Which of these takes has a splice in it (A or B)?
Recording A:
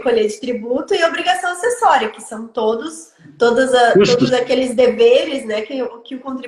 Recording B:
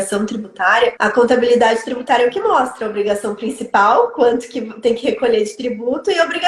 B